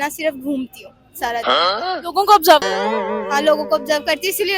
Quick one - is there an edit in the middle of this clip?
no; 0 cuts

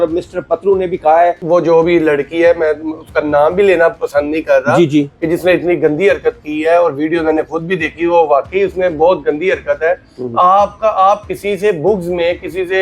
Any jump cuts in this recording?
yes; 1 cut; at 1.4 s

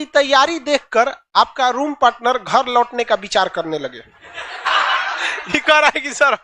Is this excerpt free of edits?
no; 1 cut; at 4.6 s

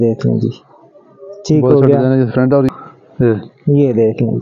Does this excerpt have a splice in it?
yes; 1 cut; at 2.7 s

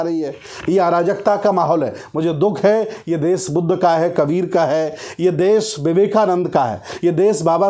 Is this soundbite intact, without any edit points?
yes; 0 cuts

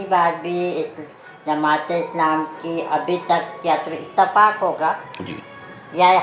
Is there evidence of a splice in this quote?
no; 0 cuts

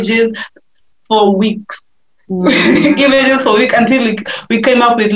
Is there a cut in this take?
no; 0 cuts

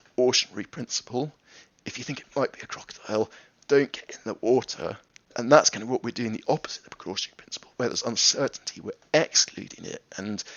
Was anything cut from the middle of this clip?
yes; 2 cuts; at 1.7 s, 5.3 s

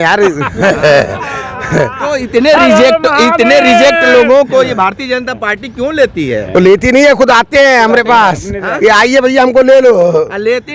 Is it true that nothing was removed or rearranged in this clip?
yes; 0 cuts

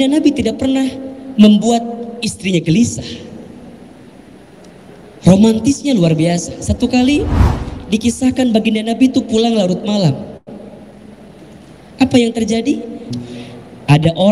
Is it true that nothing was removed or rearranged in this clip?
no; 1 cut; at 13.0 s

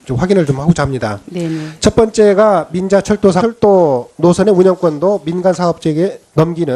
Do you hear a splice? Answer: no; 0 cuts

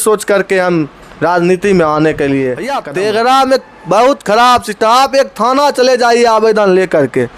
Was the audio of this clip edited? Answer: yes; 1 cut; at 2.8 s

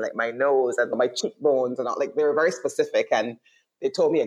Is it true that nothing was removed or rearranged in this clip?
yes; 0 cuts

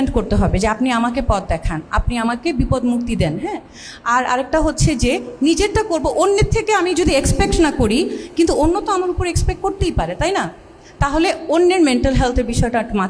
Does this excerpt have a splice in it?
no; 0 cuts

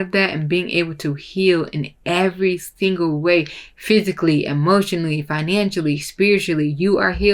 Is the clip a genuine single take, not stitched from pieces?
yes; 0 cuts

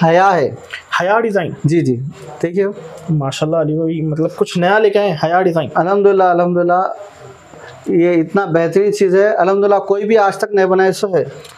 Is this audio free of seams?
yes; 0 cuts

